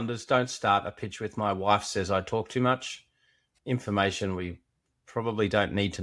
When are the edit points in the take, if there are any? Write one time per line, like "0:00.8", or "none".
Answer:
none